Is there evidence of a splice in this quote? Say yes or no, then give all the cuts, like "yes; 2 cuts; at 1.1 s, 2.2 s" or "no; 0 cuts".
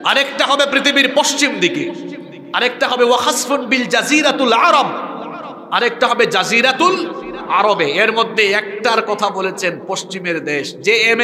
no; 0 cuts